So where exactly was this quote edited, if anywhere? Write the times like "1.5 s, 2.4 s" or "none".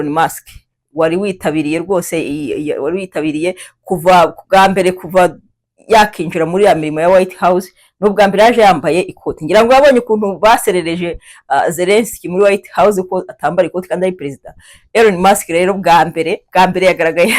none